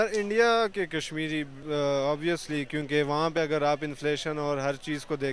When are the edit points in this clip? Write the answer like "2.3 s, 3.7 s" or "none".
none